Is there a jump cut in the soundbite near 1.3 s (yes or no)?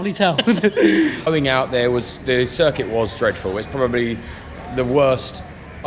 yes